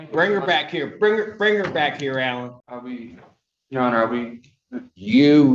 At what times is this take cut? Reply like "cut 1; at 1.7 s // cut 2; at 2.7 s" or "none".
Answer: cut 1; at 2.6 s